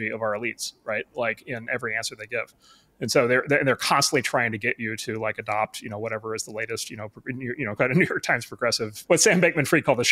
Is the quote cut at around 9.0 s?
yes; 1 cut; at 9.0 s

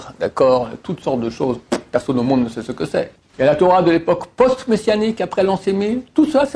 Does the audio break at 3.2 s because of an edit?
yes; 1 cut; at 3.2 s

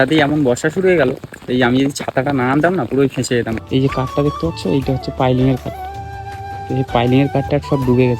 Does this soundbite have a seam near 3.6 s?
yes; 1 cut; at 3.6 s

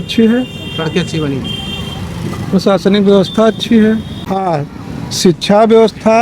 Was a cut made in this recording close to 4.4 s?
yes; 1 cut; at 4.4 s

